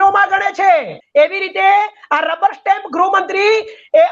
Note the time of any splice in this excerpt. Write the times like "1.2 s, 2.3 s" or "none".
1.0 s

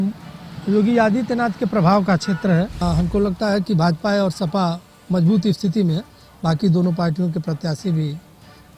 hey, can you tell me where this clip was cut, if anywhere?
2.8 s

